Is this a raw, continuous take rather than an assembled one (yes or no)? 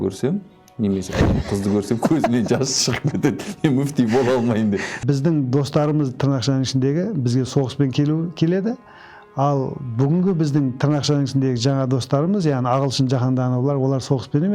no